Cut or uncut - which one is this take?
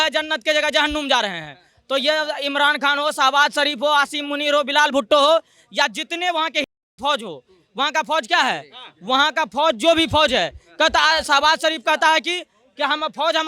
uncut